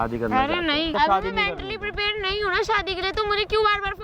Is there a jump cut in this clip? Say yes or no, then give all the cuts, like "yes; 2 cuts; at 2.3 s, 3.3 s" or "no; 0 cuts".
yes; 1 cut; at 0.9 s